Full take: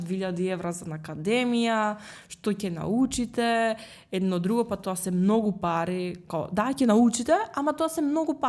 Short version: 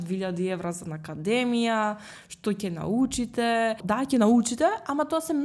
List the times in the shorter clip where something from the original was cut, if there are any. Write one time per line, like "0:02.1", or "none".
0:03.8